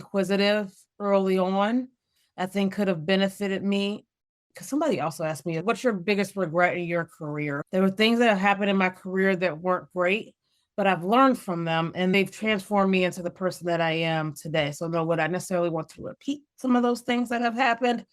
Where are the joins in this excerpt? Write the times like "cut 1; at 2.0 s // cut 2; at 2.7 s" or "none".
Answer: cut 1; at 4.6 s // cut 2; at 5.6 s // cut 3; at 7.6 s // cut 4; at 12.1 s